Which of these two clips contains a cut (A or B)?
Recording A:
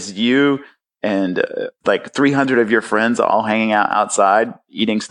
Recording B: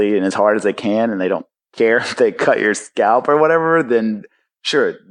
A